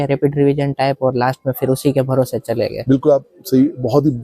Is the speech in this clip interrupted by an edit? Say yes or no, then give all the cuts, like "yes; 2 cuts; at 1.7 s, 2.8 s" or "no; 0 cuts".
no; 0 cuts